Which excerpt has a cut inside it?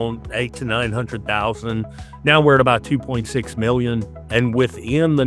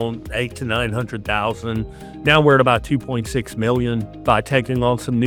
first; 1 cut; at 4.1 s

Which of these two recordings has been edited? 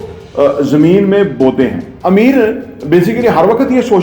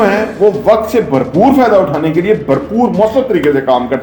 first; 1 cut; at 1.9 s

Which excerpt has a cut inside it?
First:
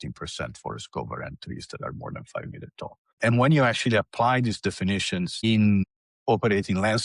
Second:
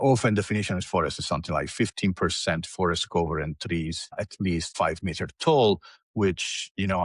first; 1 cut; at 3.2 s

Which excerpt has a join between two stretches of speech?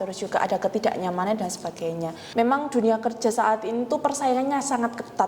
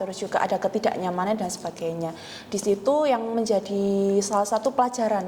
first; 1 cut; at 2.2 s

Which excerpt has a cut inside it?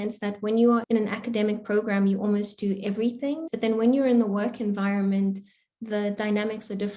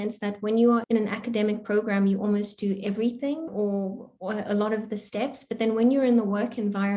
first; 1 cut; at 3.5 s

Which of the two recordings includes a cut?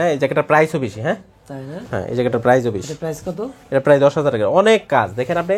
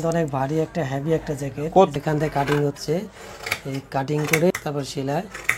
second; 2 cuts; at 1.9 s, 4.5 s

